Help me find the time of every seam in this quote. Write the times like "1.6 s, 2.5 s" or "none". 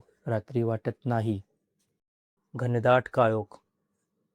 2.1 s